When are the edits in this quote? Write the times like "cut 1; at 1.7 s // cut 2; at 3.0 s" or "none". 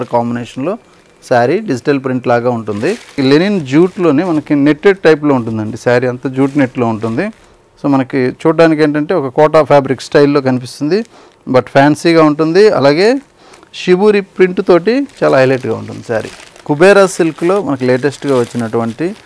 cut 1; at 3.2 s // cut 2; at 16.6 s